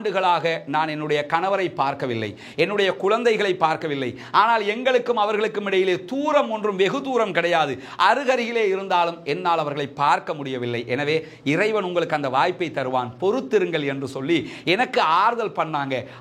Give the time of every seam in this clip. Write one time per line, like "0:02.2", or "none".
none